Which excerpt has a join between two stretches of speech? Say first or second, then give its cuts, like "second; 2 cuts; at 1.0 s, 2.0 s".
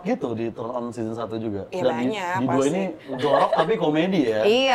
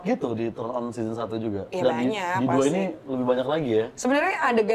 first; 1 cut; at 3.1 s